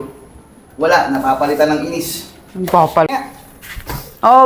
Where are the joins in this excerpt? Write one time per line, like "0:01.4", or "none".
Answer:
0:03.1

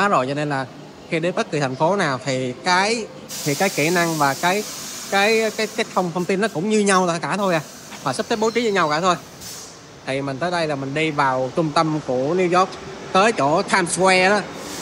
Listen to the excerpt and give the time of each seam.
none

